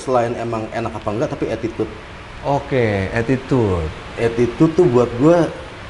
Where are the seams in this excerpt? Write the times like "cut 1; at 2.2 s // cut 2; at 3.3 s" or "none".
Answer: none